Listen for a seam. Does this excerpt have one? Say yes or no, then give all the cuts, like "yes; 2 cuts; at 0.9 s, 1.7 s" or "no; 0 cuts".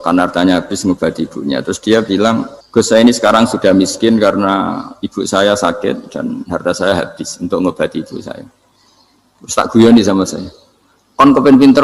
yes; 1 cut; at 2.6 s